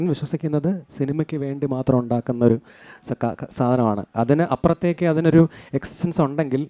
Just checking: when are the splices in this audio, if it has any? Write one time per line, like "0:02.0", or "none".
none